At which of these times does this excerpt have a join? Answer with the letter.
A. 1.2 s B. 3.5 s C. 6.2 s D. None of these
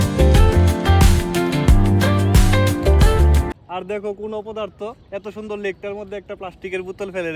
B